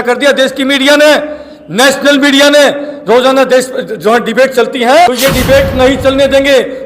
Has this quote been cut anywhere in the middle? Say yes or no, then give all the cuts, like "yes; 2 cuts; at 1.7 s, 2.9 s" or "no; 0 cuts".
yes; 1 cut; at 5.1 s